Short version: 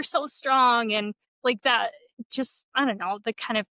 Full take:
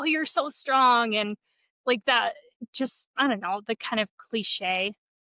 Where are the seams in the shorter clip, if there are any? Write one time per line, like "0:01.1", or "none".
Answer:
0:01.2